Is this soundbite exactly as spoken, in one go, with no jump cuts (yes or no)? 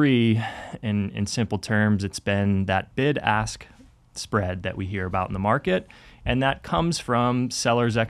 yes